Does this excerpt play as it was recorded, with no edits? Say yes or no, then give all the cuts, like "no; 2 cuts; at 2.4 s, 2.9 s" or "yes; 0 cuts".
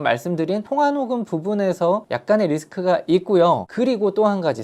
no; 2 cuts; at 2.1 s, 3.7 s